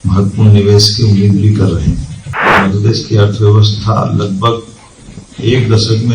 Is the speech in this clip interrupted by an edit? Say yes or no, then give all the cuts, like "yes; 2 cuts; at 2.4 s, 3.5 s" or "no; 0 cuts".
yes; 1 cut; at 2.6 s